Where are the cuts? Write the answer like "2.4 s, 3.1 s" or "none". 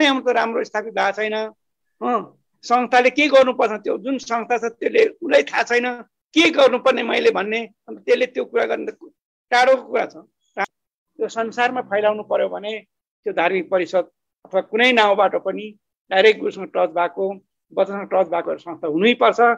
10.6 s, 11.9 s